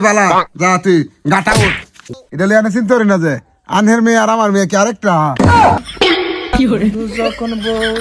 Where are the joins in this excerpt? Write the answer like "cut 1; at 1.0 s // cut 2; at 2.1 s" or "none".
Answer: cut 1; at 1.9 s // cut 2; at 5.8 s